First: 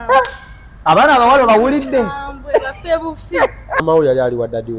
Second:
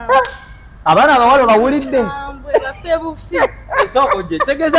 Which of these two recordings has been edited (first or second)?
first